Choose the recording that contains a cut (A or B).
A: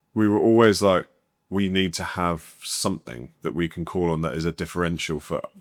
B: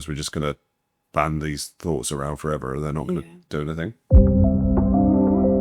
B